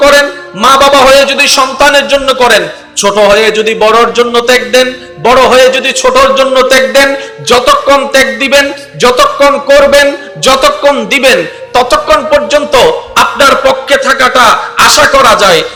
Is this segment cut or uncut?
uncut